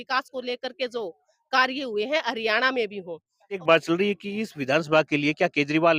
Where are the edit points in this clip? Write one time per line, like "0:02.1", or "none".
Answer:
0:03.6